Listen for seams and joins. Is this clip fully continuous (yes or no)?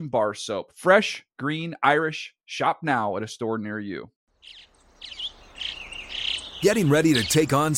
no